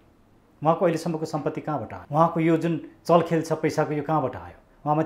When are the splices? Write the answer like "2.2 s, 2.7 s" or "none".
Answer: 2.0 s